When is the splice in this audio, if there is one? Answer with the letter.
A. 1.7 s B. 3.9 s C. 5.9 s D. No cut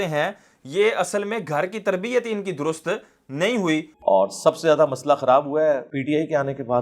B